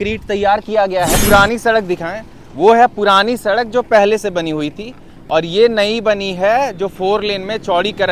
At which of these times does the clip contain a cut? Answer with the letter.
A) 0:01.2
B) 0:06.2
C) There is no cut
A